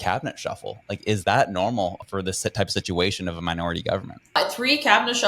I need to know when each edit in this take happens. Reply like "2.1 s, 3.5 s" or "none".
2.0 s, 4.4 s